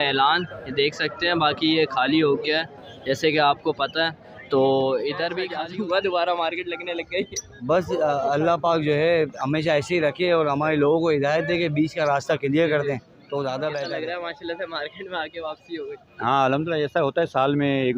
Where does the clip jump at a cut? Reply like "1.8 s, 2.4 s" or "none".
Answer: 5.4 s, 13.9 s